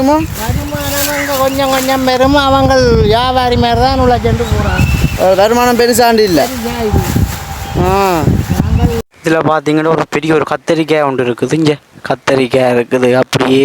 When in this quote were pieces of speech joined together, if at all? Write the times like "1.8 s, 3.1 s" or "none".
9.1 s